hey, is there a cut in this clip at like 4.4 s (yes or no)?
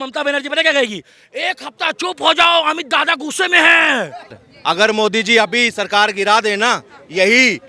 yes